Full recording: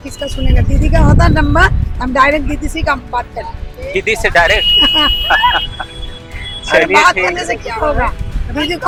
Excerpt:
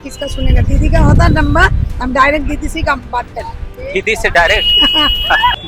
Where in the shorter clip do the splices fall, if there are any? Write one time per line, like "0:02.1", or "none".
none